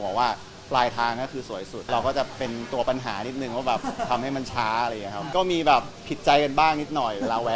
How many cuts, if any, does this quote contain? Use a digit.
1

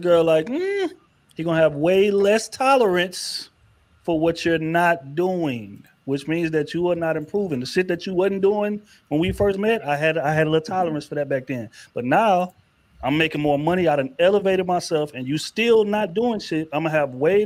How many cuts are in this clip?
0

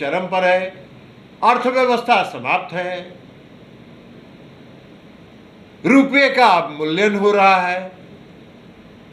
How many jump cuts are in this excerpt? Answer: 0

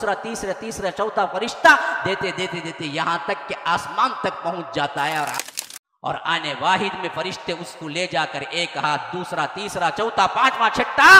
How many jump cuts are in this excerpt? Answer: 1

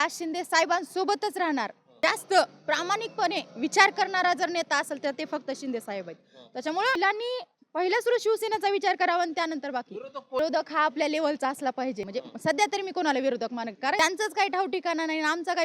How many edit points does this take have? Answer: 5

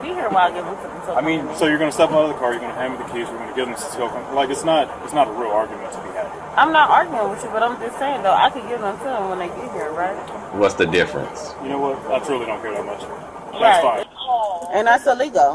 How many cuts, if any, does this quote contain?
1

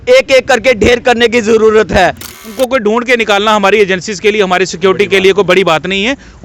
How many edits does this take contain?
1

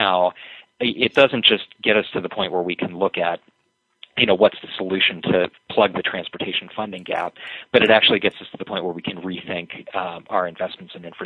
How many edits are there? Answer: 0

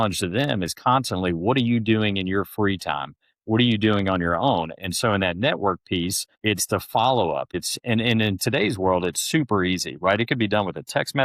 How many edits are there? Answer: 2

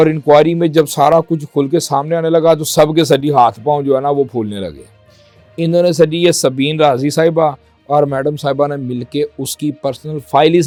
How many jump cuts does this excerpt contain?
0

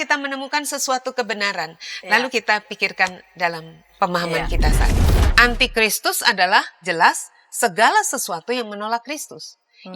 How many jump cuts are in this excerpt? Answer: 1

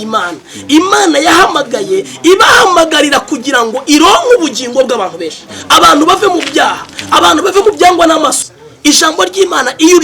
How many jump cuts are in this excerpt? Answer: 1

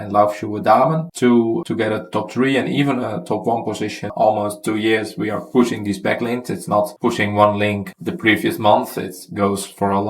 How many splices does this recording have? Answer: 1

